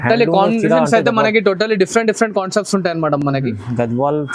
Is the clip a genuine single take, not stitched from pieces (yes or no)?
yes